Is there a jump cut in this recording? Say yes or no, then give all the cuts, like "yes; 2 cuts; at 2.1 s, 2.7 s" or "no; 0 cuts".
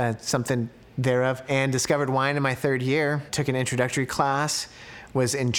yes; 2 cuts; at 1.5 s, 3.3 s